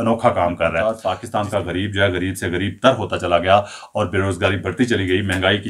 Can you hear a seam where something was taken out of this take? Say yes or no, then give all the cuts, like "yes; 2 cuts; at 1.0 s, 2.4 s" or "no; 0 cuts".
yes; 1 cut; at 0.9 s